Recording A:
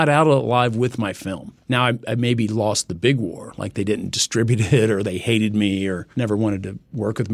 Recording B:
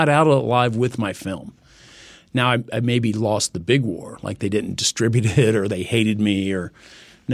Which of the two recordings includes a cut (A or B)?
A